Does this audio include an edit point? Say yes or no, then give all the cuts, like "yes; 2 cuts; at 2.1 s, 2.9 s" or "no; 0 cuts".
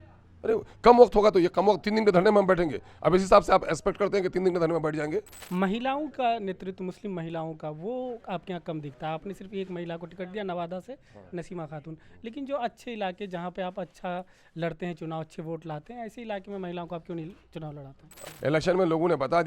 yes; 2 cuts; at 5.4 s, 18.2 s